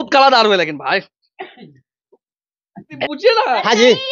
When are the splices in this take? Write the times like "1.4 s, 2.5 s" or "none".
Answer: 3.0 s